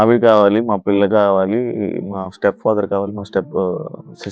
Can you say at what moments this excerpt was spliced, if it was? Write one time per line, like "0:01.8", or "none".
none